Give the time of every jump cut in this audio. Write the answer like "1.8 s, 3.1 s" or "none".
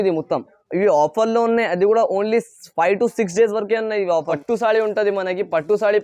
4.4 s